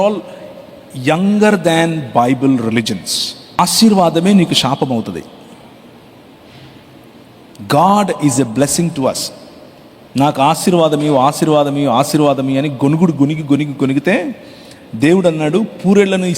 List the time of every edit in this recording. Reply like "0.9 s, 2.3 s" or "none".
3.6 s